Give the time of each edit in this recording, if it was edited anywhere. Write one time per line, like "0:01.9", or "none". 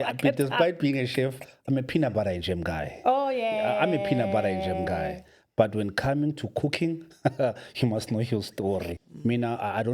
0:09.0